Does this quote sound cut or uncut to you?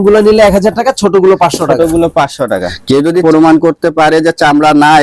cut